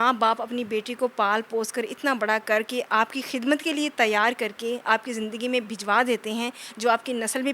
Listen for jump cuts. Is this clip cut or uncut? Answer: uncut